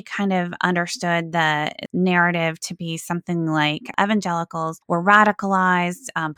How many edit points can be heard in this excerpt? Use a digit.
3